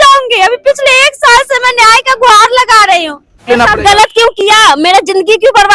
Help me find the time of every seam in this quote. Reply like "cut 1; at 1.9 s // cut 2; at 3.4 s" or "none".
cut 1; at 3.4 s